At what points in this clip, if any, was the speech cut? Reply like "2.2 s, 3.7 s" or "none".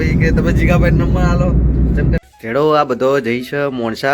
2.2 s